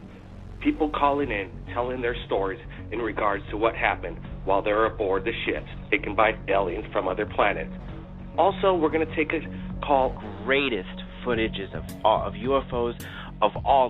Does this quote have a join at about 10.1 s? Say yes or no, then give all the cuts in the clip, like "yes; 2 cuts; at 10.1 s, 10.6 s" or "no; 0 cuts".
no; 0 cuts